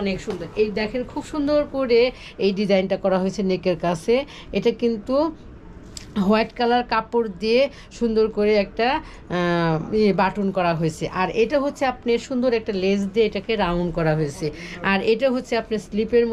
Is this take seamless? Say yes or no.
yes